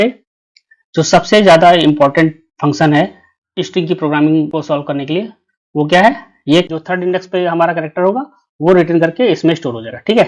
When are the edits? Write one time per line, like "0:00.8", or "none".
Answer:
0:06.7